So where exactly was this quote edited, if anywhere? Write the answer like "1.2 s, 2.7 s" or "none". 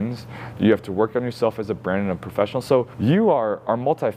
2.9 s